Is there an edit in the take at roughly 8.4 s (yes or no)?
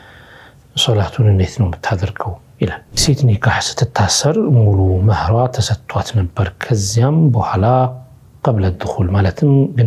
no